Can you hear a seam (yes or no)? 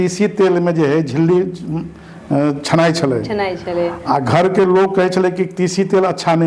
no